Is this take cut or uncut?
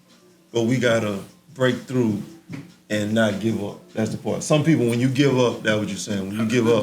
uncut